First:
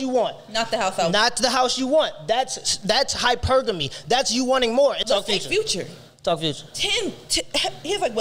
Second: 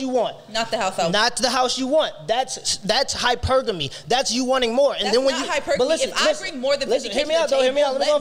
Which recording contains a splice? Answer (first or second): first